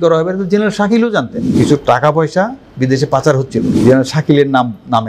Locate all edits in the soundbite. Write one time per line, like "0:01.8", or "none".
0:01.5
0:03.7